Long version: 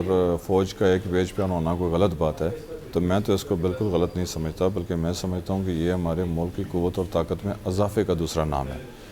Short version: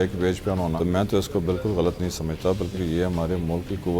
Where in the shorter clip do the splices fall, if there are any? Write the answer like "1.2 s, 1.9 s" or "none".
0.7 s, 2.7 s